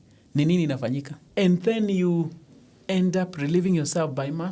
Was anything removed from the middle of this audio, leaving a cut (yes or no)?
yes